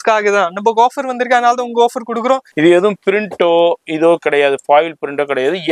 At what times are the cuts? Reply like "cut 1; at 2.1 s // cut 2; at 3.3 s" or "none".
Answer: cut 1; at 2.5 s